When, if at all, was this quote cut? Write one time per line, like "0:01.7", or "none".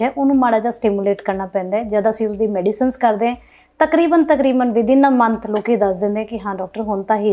none